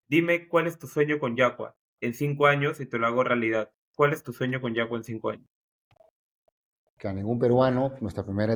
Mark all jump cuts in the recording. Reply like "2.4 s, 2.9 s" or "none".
none